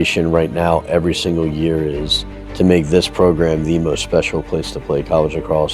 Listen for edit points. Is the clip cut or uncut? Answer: uncut